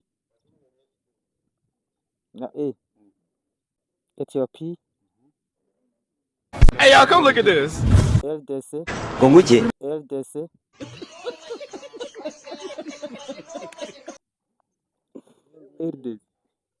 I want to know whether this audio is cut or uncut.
uncut